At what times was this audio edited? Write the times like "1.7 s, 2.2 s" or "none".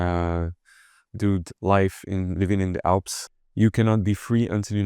3.2 s